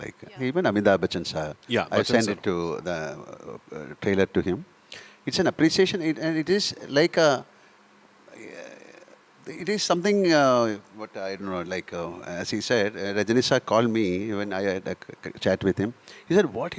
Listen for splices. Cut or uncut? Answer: uncut